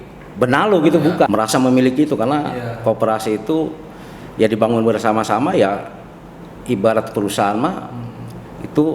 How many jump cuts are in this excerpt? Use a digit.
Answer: 1